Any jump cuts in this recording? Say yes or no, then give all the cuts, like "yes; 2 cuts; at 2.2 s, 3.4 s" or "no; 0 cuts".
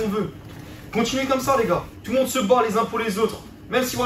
yes; 1 cut; at 1.9 s